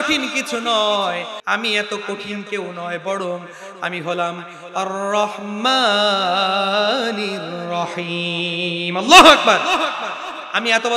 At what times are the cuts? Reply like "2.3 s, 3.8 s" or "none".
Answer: 1.4 s